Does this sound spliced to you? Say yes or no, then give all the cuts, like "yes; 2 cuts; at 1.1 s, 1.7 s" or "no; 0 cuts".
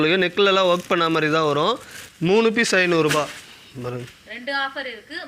yes; 1 cut; at 2.1 s